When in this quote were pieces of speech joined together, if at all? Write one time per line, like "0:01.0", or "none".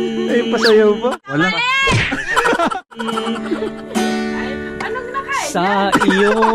0:01.1
0:03.0